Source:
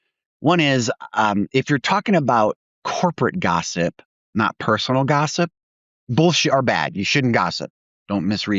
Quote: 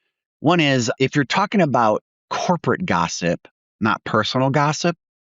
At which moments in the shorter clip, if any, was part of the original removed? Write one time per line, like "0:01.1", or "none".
0:01.0